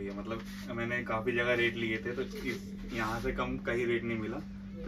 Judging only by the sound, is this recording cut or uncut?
uncut